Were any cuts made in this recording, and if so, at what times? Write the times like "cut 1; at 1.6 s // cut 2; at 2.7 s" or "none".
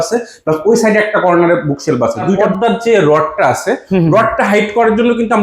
cut 1; at 2.4 s